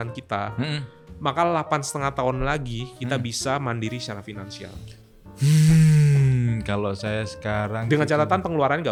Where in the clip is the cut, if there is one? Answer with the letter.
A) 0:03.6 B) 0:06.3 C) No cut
C